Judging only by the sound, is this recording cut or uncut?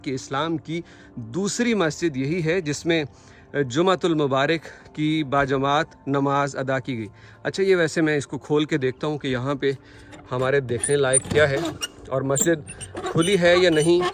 uncut